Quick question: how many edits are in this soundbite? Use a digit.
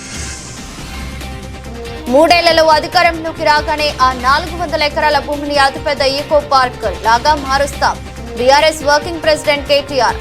1